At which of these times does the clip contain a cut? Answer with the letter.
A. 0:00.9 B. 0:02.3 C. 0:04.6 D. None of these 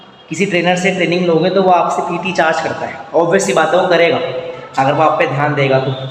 D